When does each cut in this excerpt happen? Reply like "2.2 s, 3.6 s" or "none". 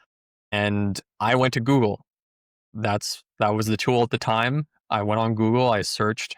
none